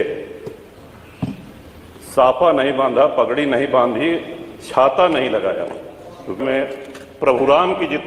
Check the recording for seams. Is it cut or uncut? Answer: cut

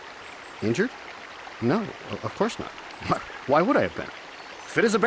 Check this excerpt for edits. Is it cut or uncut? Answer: uncut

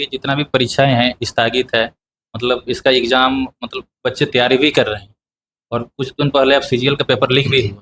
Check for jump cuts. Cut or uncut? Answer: uncut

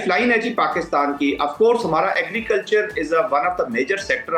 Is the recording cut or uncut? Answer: uncut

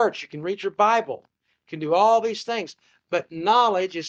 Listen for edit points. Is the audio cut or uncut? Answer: uncut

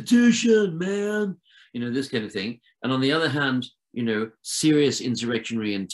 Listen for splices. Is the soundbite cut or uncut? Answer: uncut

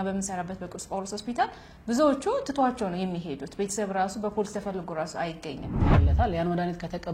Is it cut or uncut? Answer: cut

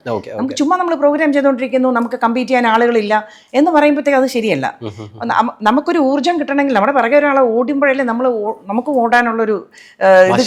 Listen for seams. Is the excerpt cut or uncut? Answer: uncut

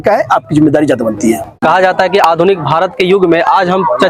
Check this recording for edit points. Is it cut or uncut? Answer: uncut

